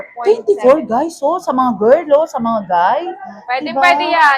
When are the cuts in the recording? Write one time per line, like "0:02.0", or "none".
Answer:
none